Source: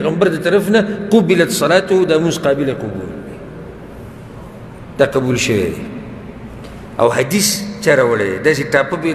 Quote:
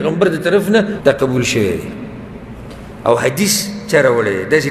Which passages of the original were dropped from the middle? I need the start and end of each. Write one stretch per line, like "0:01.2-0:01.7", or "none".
0:00.9-0:04.9